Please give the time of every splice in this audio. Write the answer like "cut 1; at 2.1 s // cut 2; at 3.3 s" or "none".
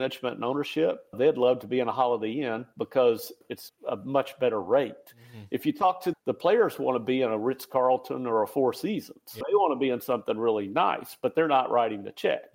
cut 1; at 1.2 s // cut 2; at 3.5 s // cut 3; at 6.1 s // cut 4; at 9.4 s